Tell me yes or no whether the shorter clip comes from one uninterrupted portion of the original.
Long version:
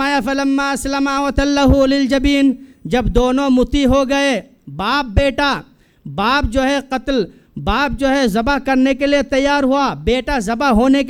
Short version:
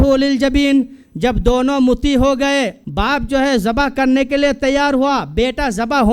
no